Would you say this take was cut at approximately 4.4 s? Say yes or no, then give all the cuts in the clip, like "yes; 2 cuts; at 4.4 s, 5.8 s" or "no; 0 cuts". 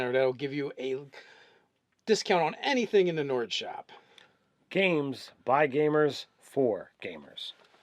yes; 1 cut; at 4.4 s